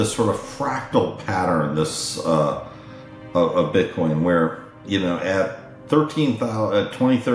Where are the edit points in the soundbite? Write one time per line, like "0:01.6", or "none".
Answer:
none